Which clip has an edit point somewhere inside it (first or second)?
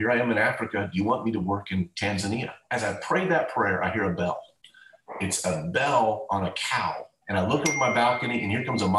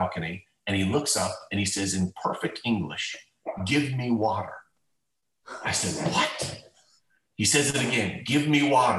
first